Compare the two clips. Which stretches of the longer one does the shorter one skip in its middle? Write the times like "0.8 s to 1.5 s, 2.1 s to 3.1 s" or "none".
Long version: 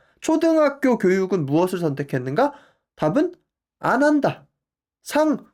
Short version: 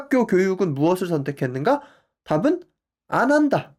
none